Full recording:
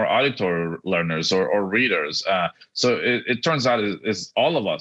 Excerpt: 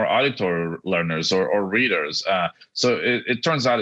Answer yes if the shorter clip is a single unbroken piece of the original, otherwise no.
yes